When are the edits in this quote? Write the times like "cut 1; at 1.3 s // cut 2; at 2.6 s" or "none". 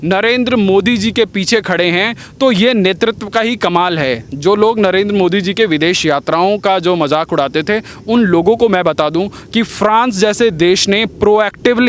none